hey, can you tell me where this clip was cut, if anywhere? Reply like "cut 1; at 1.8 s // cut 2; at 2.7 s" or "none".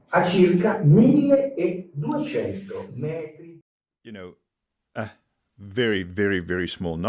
cut 1; at 3.4 s

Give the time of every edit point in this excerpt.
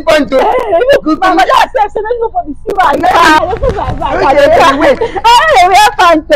cut 1; at 3.4 s

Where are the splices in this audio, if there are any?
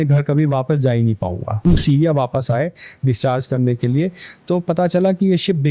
cut 1; at 1.6 s

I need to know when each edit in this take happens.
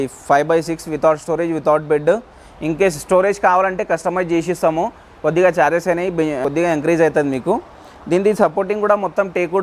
none

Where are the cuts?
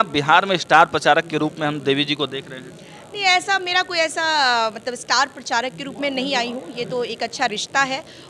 none

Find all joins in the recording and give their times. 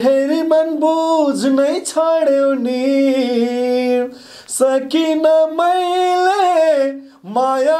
none

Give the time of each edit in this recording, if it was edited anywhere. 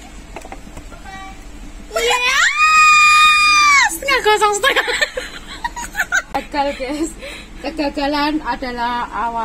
cut 1; at 6.4 s

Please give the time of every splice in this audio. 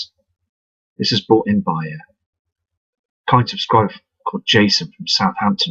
cut 1; at 1.2 s

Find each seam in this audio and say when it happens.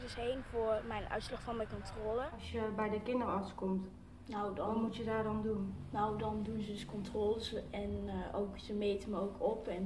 cut 1; at 2.4 s

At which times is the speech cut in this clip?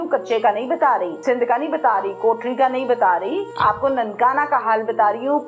cut 1; at 1.1 s // cut 2; at 3.5 s

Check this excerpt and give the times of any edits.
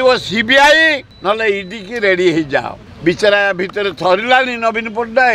cut 1; at 1.1 s // cut 2; at 2.8 s

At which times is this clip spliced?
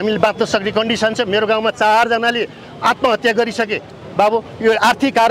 none

